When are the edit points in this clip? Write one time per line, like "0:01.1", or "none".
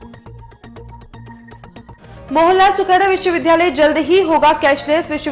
none